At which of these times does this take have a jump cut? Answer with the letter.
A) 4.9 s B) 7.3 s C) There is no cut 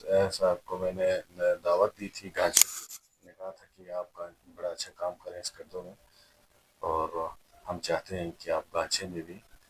C